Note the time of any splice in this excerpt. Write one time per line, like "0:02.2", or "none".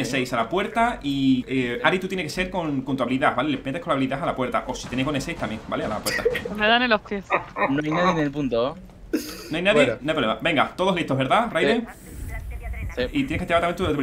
0:01.5